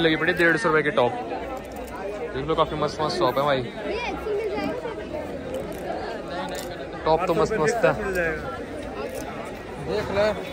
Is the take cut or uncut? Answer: uncut